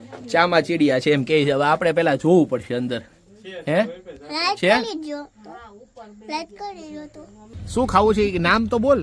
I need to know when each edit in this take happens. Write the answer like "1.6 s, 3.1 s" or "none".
7.4 s